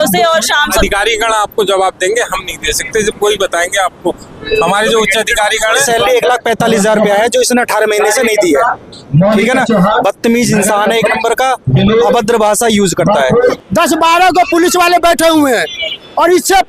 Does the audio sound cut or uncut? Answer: cut